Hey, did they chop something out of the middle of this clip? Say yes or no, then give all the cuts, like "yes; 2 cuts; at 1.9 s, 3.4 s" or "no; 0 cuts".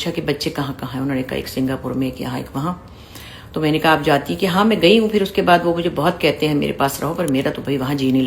no; 0 cuts